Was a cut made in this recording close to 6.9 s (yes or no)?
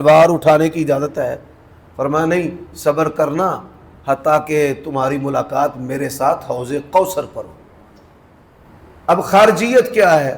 no